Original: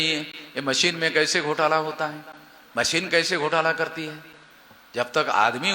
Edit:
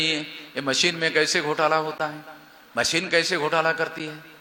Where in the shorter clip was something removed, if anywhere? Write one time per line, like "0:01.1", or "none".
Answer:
none